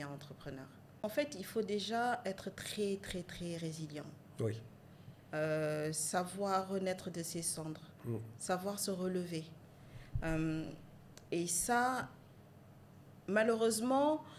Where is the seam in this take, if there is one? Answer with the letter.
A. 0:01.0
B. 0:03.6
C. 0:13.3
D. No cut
A